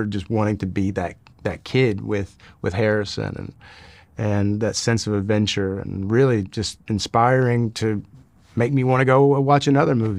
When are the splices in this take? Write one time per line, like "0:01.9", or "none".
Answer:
none